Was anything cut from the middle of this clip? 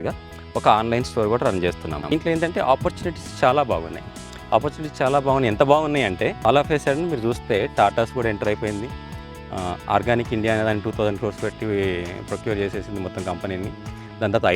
yes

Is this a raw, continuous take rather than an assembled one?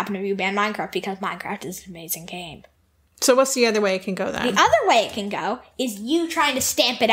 yes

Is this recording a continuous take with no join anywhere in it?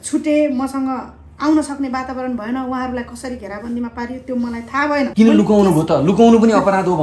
no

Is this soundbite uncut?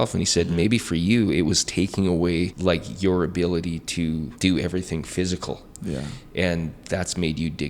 no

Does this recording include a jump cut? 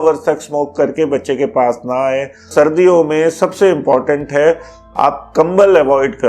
yes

